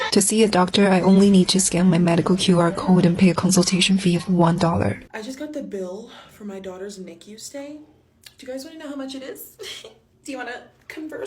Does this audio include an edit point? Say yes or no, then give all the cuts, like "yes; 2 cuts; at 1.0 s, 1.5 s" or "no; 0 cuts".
yes; 1 cut; at 5.1 s